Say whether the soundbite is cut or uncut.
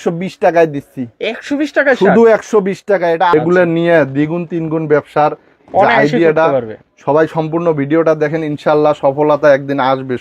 cut